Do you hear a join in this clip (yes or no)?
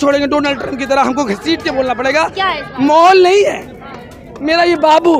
yes